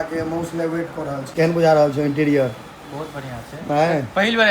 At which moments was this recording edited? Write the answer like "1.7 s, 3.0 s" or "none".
1.3 s